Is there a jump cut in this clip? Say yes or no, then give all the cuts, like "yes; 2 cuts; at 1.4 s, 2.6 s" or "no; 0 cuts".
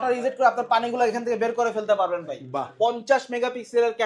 yes; 1 cut; at 2.6 s